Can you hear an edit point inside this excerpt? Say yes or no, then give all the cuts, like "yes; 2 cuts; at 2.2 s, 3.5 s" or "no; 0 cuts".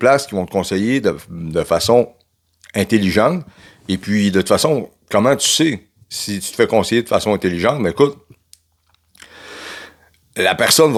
no; 0 cuts